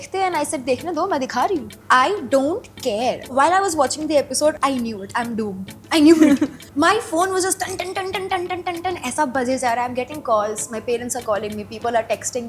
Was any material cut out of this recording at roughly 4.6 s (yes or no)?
yes